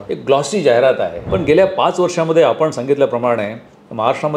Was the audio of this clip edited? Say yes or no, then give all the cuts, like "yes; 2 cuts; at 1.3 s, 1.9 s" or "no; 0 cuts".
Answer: yes; 1 cut; at 1.2 s